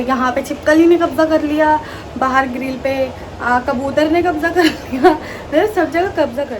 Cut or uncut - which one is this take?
uncut